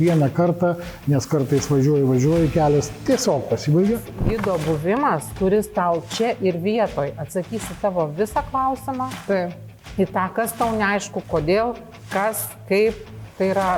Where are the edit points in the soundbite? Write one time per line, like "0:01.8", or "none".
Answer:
0:04.2